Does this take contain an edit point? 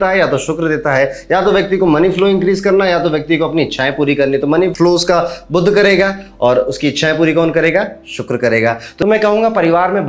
yes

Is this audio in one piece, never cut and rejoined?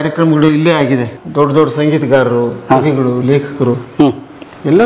no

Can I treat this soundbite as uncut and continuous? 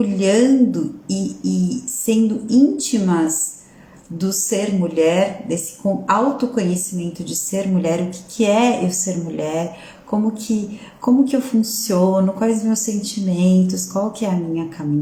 yes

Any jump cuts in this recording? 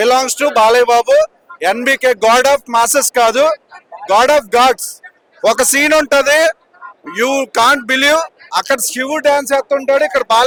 no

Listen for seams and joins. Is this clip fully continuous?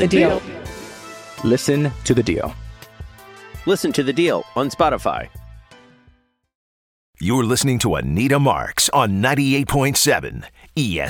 no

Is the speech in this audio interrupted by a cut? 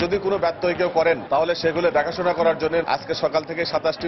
yes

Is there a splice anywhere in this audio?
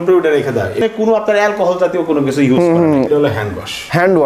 yes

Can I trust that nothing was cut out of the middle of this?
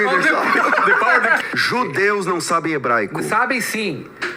no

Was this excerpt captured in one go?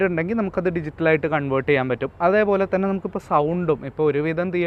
yes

